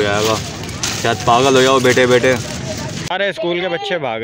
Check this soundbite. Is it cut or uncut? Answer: cut